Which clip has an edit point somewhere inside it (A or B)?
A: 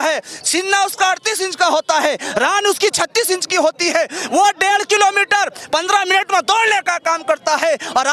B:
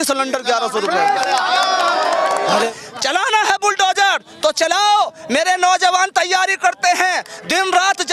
B